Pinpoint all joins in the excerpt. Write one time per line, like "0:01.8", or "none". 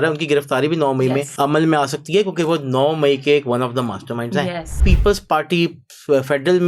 0:01.3
0:04.8